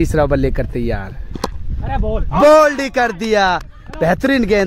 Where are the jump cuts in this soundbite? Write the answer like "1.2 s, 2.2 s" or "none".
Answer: none